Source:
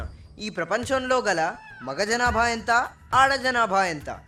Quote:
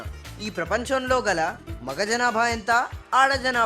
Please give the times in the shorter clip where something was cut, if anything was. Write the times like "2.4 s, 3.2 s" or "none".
none